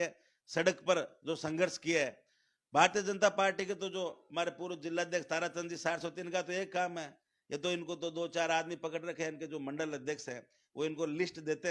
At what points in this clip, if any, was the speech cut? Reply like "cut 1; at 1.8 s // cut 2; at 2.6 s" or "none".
none